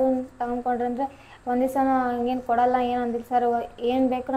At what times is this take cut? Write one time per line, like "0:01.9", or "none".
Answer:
none